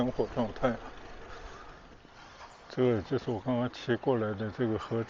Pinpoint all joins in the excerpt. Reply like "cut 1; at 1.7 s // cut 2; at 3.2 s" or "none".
cut 1; at 1.9 s